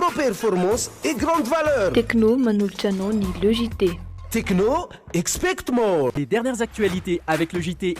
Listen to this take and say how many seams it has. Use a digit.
1